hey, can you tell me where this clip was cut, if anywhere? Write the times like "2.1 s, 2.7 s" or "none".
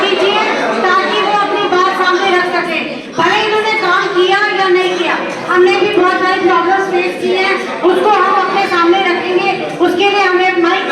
none